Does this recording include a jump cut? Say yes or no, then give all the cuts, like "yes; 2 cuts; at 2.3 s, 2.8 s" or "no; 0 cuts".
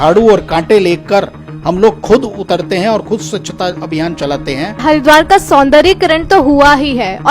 yes; 1 cut; at 4.8 s